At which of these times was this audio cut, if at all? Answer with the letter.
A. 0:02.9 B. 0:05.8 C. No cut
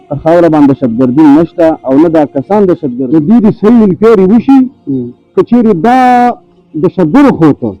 A